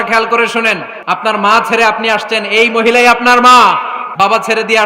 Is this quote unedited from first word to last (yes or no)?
no